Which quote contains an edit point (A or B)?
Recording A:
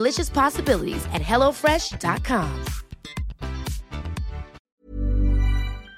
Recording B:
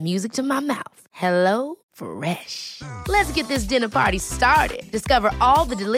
A